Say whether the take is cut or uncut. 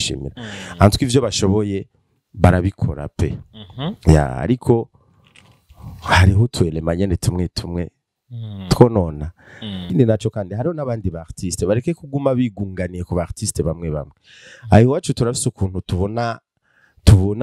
cut